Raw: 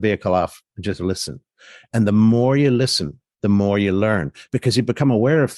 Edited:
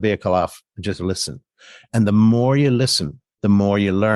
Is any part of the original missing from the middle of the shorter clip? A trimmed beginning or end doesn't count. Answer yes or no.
no